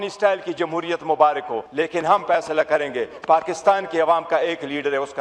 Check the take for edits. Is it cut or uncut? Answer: cut